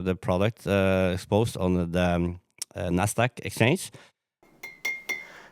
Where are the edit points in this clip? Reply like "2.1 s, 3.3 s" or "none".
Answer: 4.5 s